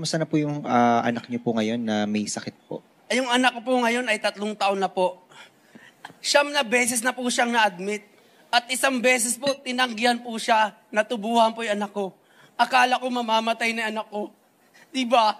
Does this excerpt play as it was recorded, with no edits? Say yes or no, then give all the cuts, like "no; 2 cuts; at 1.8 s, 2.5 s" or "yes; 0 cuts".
yes; 0 cuts